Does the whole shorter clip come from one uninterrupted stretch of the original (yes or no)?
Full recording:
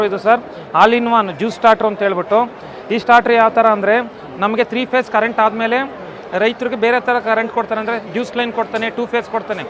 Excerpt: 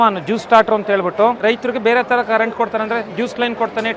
no